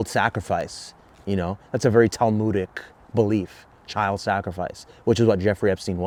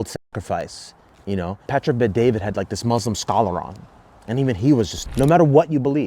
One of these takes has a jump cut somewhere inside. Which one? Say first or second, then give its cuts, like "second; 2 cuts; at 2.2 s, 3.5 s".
second; 2 cuts; at 1.6 s, 5.0 s